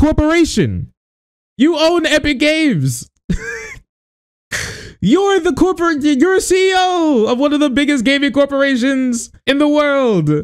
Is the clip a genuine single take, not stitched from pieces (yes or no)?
no